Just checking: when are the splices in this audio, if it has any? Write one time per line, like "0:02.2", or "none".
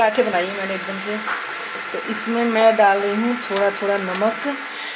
none